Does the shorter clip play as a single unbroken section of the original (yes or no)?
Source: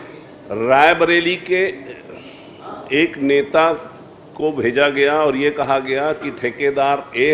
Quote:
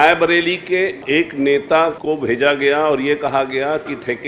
no